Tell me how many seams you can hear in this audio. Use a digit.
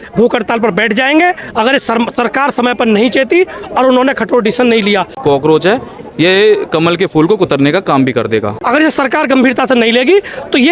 2